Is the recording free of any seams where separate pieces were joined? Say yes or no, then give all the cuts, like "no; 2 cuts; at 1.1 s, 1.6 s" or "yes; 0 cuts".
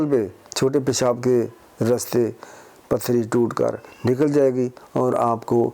yes; 0 cuts